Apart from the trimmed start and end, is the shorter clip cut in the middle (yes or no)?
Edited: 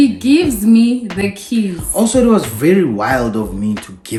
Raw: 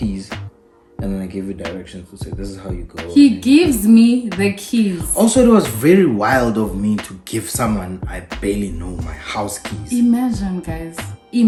no